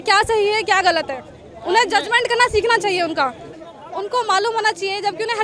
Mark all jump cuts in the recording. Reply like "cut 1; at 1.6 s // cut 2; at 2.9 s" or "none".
cut 1; at 3.5 s